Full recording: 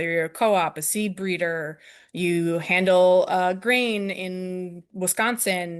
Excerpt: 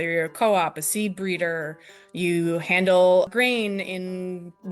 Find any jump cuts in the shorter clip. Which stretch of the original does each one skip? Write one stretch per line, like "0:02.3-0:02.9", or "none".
0:03.3-0:03.6